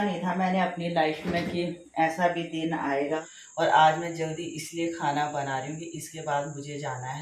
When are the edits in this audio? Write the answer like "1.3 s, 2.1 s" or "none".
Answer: 3.4 s